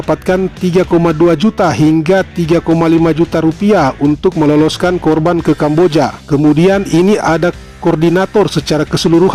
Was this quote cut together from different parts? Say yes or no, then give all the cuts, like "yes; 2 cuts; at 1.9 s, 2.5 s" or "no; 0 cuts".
no; 0 cuts